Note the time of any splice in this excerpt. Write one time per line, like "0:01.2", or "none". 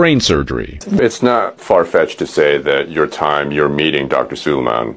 0:01.0

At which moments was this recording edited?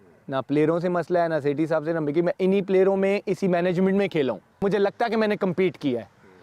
0:04.6

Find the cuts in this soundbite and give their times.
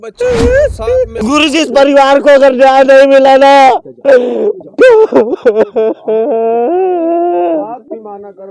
0:01.2

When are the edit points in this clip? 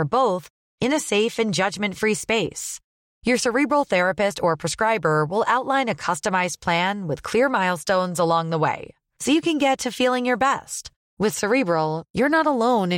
none

